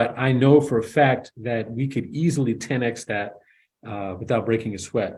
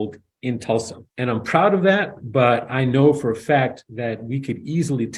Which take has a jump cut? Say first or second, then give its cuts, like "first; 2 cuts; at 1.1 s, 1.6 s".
second; 1 cut; at 1.0 s